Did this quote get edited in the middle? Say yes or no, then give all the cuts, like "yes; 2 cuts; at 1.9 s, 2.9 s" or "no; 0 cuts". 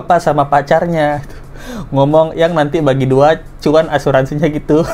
no; 0 cuts